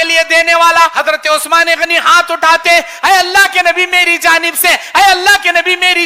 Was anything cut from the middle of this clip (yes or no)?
yes